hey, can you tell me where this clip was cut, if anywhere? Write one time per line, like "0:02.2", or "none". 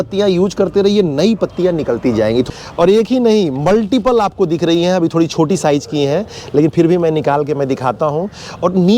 0:02.5